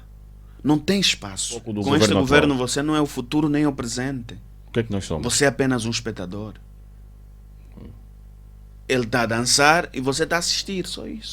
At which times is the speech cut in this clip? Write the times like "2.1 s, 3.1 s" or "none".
1.7 s